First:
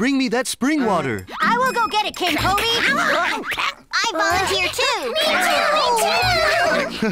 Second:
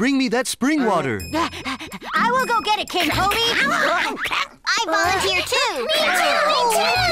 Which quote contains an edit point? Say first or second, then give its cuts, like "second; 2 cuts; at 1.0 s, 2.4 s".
first; 1 cut; at 1.2 s